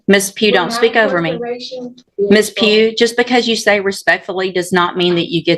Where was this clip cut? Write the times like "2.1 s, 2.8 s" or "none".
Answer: 2.0 s